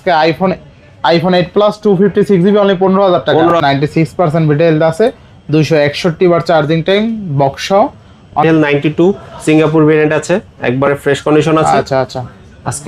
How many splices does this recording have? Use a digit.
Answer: 2